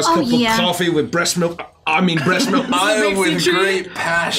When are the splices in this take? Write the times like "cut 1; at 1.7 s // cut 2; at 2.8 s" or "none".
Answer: cut 1; at 2.7 s